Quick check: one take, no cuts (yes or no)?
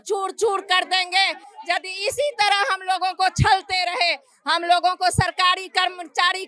yes